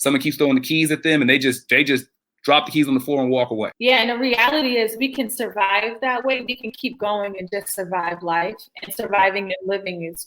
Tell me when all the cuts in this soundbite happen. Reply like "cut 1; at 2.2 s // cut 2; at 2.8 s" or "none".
cut 1; at 3.7 s

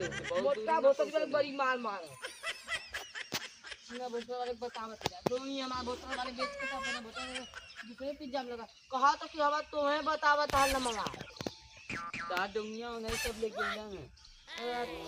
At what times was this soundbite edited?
none

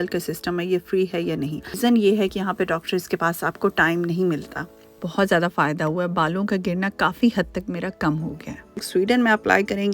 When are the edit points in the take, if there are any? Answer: cut 1; at 1.8 s // cut 2; at 4.7 s // cut 3; at 8.8 s

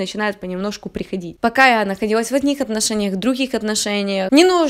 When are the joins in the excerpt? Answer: cut 1; at 1.4 s

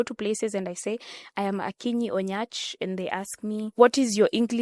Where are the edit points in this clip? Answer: cut 1; at 3.7 s

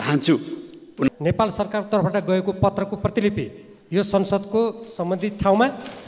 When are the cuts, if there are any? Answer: cut 1; at 1.1 s

